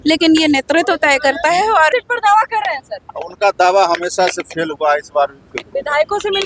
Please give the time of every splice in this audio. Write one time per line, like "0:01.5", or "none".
0:01.9